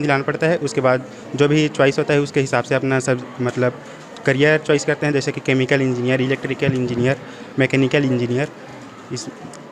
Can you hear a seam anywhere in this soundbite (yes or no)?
no